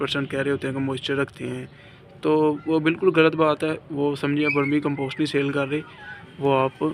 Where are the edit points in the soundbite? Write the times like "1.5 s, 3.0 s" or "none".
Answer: none